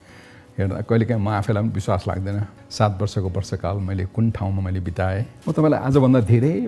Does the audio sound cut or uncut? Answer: cut